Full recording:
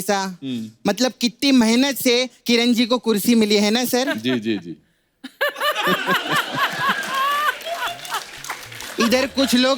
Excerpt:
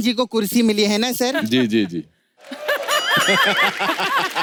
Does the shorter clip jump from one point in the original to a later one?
no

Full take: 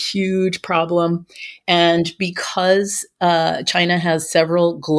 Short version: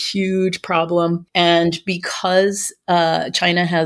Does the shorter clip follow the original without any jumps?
no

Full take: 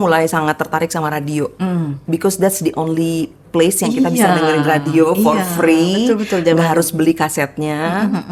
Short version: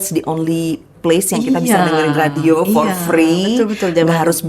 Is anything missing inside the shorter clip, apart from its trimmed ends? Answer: no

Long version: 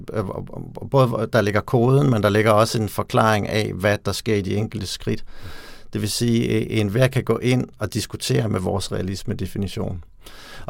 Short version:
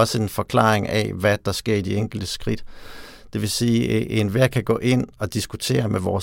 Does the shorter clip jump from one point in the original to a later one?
no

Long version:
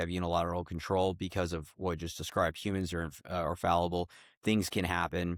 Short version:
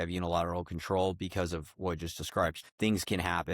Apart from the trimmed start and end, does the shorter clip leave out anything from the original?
yes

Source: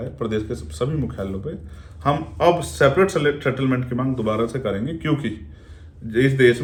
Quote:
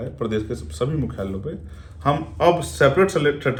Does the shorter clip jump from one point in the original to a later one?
no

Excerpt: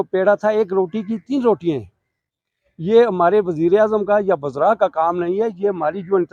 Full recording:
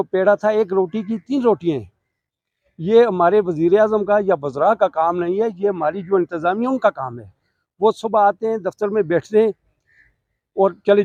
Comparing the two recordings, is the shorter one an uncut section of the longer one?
yes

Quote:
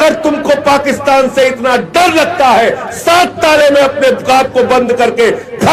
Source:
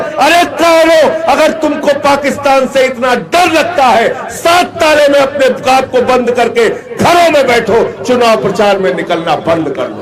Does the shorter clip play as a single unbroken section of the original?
yes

